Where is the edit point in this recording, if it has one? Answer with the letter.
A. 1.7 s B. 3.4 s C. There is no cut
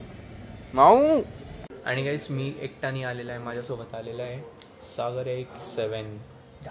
A